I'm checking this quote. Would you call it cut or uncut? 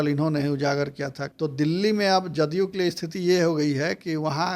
cut